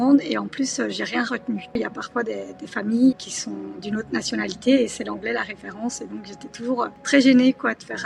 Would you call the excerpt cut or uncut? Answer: cut